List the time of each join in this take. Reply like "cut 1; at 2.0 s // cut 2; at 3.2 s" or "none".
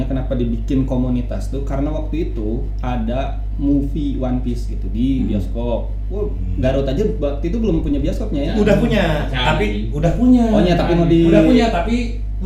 none